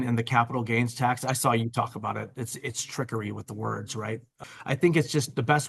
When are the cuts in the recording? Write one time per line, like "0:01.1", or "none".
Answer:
0:04.3